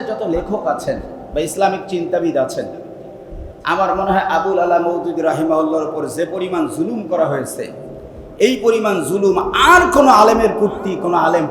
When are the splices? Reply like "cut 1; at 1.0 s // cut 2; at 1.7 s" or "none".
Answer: none